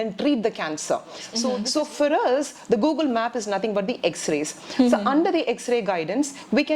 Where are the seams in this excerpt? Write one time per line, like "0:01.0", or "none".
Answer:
0:01.5